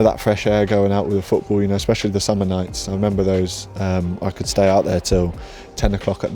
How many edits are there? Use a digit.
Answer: 0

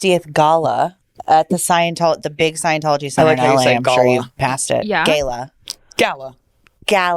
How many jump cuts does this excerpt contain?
1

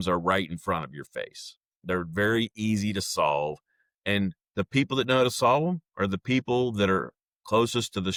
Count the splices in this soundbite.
0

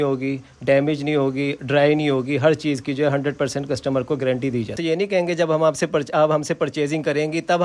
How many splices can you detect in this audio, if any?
1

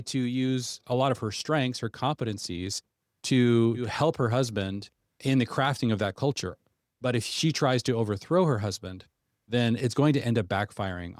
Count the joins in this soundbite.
2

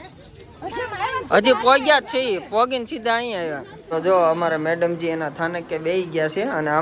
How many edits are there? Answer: 1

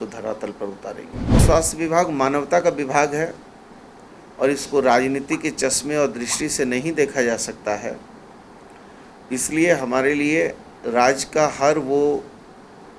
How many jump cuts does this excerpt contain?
1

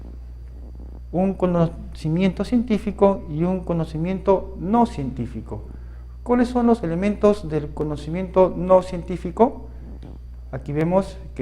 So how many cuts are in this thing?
1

